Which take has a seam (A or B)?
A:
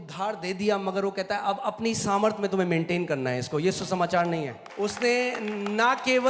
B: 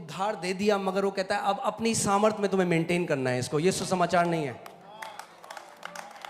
A